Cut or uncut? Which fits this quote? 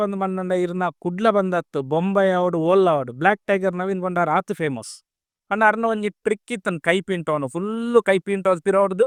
uncut